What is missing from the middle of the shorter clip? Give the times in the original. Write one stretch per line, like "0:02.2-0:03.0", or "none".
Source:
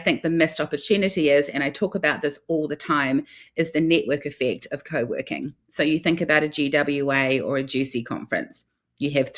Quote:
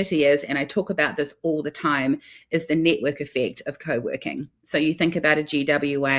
none